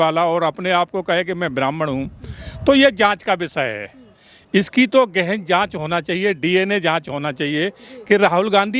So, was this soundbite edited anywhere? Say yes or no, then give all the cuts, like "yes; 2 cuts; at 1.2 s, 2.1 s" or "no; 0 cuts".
no; 0 cuts